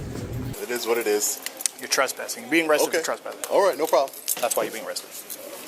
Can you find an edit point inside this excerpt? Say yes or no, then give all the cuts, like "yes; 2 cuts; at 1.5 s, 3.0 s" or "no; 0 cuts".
no; 0 cuts